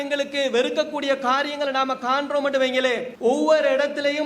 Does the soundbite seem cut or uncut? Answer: cut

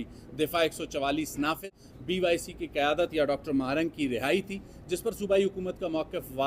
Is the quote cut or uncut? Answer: cut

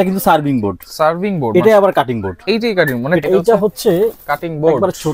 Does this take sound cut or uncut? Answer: cut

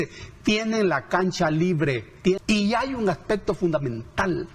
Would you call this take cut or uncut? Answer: cut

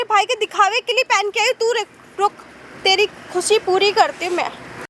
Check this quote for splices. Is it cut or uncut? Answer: uncut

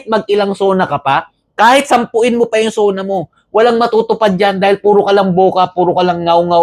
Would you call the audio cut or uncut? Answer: uncut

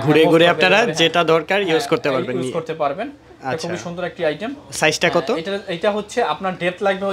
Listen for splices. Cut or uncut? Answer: uncut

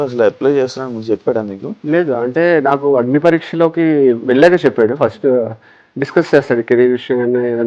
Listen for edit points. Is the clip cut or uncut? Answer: cut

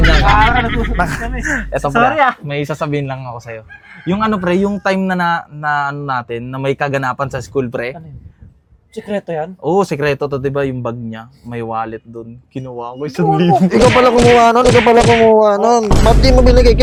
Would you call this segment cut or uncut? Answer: uncut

